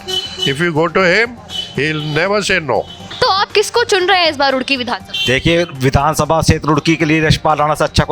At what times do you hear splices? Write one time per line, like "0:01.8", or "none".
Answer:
0:03.0